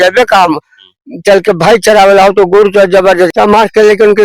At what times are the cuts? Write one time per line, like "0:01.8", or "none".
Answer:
0:03.3